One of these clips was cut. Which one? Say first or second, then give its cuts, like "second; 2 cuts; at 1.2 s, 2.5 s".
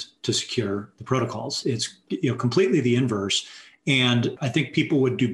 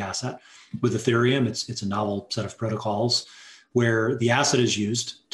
first; 2 cuts; at 1.6 s, 4.4 s